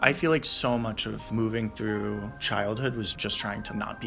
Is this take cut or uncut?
cut